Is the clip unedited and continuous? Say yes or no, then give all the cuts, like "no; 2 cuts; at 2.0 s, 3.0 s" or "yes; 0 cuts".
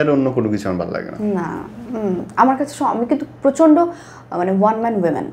yes; 0 cuts